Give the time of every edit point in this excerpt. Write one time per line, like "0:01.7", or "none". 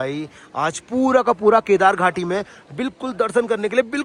none

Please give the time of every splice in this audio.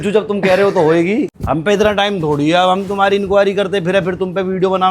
0:01.4

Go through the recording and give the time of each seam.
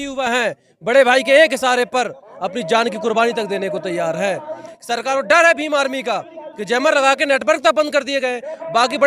0:04.7

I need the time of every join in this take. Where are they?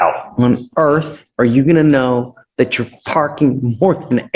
none

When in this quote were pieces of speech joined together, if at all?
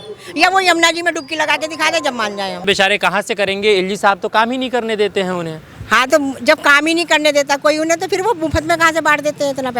0:02.6

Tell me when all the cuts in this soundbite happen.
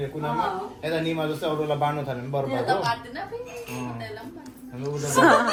none

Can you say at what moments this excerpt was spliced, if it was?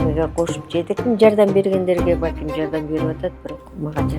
0:01.0

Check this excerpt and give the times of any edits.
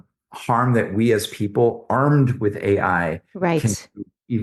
none

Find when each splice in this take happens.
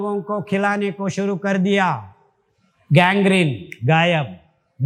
none

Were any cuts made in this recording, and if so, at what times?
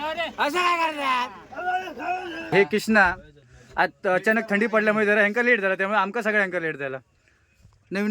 0:02.5

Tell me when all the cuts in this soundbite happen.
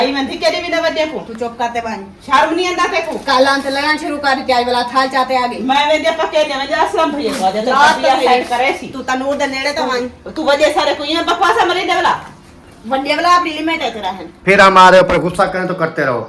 0:14.2

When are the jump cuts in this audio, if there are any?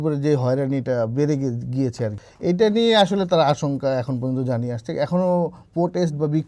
0:02.2

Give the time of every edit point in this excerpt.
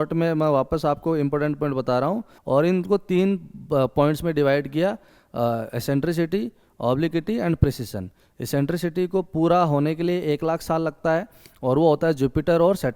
0:02.3

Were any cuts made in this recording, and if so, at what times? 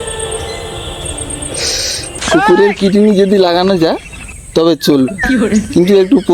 0:02.1

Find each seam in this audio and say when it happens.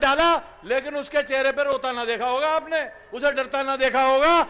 none

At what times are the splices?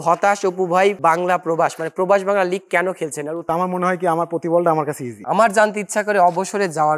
0:01.0
0:03.5
0:05.1

